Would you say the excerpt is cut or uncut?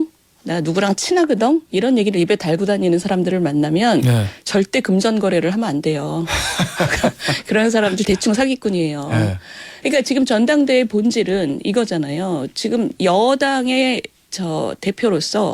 uncut